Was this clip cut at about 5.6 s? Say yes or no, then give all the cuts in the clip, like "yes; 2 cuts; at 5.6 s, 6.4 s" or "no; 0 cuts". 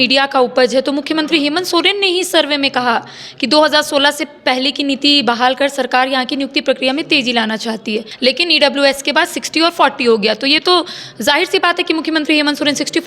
no; 1 cut; at 8.1 s